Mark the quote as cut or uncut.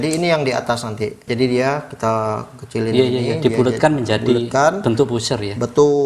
cut